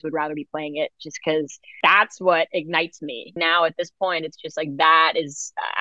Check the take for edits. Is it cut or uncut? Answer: cut